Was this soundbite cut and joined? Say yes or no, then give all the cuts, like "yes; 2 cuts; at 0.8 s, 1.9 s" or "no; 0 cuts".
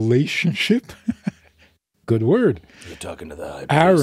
no; 0 cuts